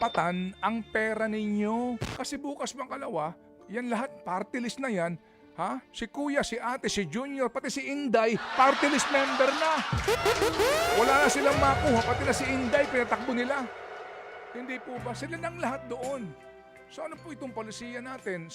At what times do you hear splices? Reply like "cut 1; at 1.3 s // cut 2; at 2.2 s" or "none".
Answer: cut 1; at 2.1 s